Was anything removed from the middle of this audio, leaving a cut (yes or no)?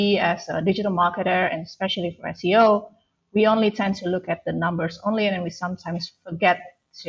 no